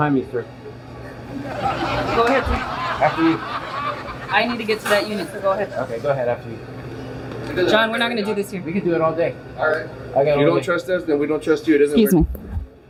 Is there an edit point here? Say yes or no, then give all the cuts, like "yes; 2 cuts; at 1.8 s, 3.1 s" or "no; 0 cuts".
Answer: no; 0 cuts